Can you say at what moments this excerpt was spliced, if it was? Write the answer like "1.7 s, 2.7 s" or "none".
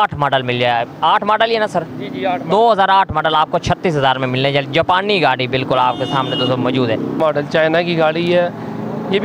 7.1 s